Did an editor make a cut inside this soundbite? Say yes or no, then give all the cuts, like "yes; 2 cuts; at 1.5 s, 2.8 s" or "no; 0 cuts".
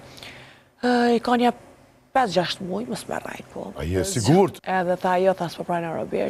yes; 1 cut; at 4.6 s